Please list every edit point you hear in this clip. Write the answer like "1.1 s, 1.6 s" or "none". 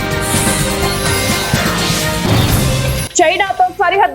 3.0 s